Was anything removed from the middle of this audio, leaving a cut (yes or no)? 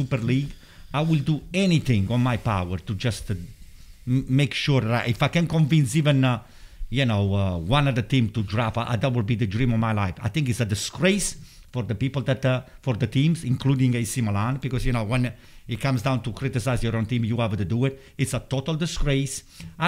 no